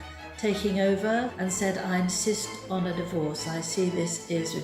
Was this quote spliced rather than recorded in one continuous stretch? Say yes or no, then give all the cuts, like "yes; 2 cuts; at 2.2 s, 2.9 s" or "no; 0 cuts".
yes; 1 cut; at 1.3 s